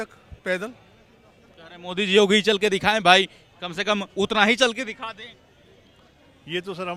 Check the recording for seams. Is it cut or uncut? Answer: uncut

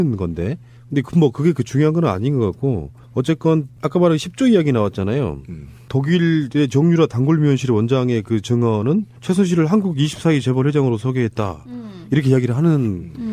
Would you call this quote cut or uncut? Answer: uncut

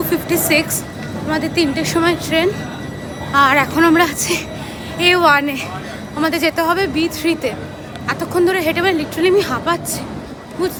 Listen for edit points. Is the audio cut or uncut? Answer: uncut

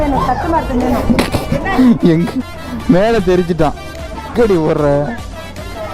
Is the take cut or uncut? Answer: cut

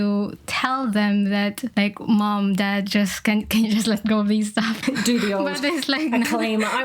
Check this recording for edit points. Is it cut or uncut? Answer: cut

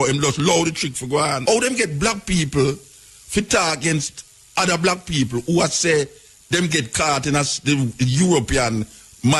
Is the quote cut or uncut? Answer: cut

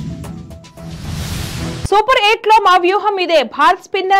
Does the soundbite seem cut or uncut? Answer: cut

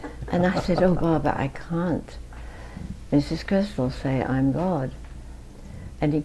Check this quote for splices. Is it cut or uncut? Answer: uncut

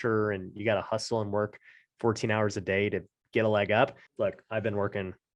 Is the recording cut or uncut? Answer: cut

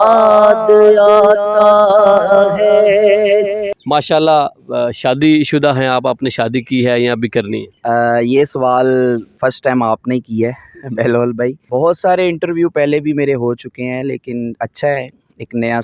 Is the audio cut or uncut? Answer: cut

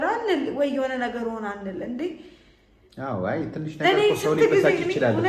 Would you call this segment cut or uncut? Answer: uncut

